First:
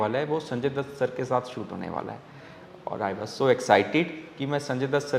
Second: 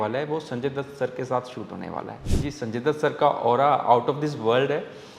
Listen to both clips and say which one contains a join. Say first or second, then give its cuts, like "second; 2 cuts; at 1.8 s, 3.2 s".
second; 1 cut; at 2.2 s